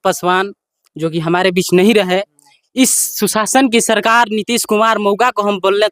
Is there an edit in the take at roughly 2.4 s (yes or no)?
no